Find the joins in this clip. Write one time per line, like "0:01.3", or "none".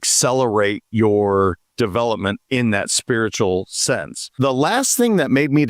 0:04.3